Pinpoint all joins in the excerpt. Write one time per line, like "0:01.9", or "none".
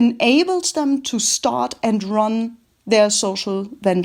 none